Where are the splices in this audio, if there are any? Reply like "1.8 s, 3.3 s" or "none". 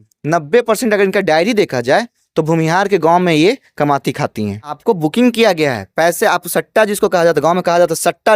none